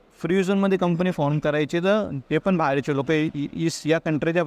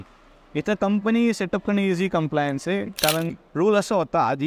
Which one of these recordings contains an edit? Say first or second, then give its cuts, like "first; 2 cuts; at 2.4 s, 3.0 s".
second; 1 cut; at 3.4 s